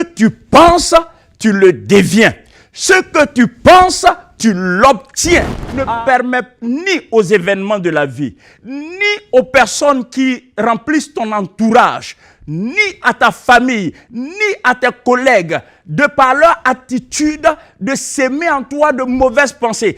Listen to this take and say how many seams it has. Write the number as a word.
one